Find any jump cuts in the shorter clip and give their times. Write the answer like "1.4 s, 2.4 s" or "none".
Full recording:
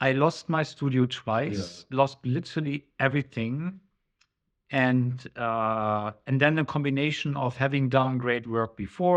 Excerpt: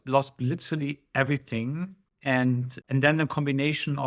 2.1 s, 2.8 s